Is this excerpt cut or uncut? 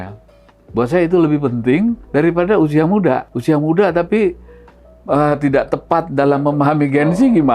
cut